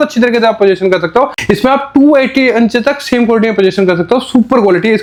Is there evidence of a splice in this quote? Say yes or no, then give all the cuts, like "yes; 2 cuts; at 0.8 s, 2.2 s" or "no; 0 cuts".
no; 0 cuts